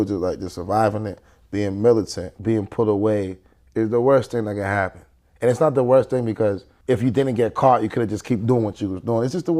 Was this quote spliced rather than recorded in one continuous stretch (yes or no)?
yes